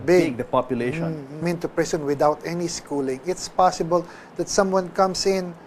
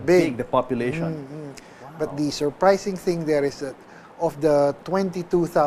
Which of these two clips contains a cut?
second; 1 cut; at 1.4 s

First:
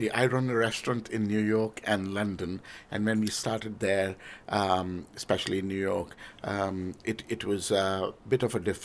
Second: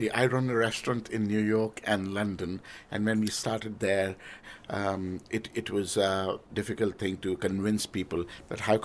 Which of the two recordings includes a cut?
second; 2 cuts; at 4.4 s, 6.4 s

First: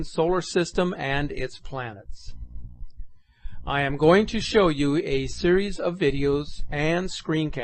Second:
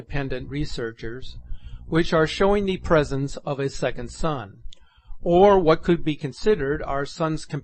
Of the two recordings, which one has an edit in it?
first; 1 cut; at 2.1 s

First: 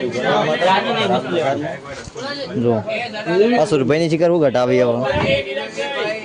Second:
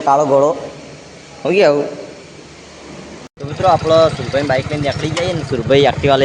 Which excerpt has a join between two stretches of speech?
second; 1 cut; at 3.3 s

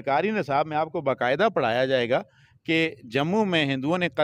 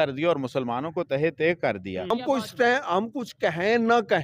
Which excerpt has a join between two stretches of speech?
second; 1 cut; at 2.1 s

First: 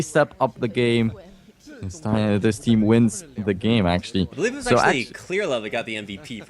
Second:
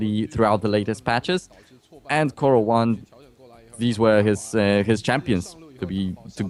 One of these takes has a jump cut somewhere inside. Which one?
first; 1 cut; at 0.9 s

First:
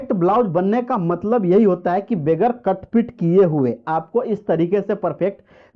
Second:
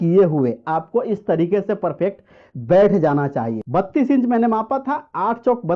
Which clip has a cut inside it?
second; 1 cut; at 3.6 s

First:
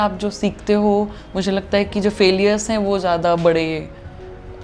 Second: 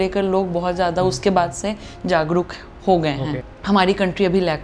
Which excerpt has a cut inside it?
second; 1 cut; at 3.5 s

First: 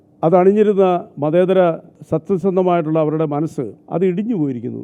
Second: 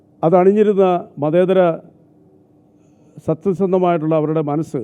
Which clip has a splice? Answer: first; 2 cuts; at 1.9 s, 3.8 s

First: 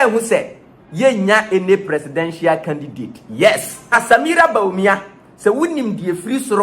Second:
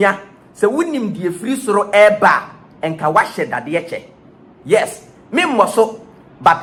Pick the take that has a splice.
first; 1 cut; at 3.9 s

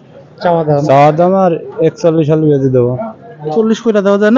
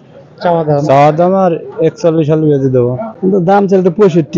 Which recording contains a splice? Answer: second; 1 cut; at 3.1 s

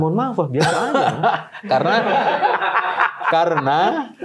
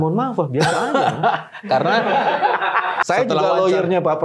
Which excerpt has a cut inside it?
second; 1 cut; at 3.0 s

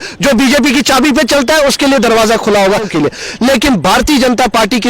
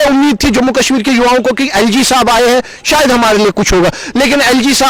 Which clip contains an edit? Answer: first; 1 cut; at 2.9 s

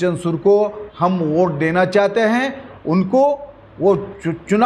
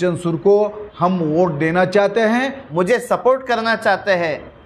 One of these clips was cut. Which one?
second; 1 cut; at 2.6 s

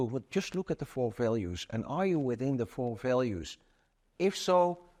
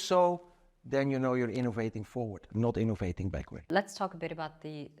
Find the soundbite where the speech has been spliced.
second; 1 cut; at 3.5 s

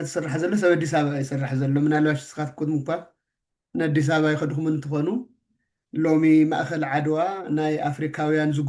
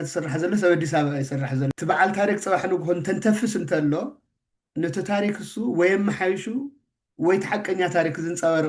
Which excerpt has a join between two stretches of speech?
second; 1 cut; at 1.7 s

